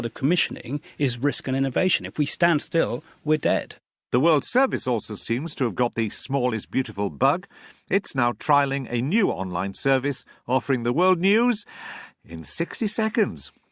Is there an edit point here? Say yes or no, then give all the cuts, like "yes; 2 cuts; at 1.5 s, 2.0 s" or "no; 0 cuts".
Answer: yes; 1 cut; at 3.7 s